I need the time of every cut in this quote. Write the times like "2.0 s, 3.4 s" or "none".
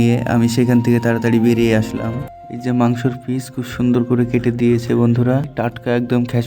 2.3 s, 5.5 s